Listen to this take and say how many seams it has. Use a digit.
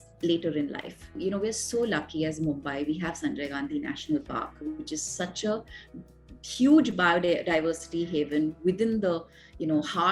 1